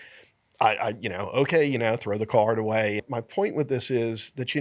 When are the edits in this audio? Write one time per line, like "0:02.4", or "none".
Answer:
0:03.1